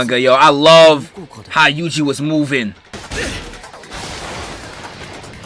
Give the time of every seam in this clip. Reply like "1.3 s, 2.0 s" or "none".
3.0 s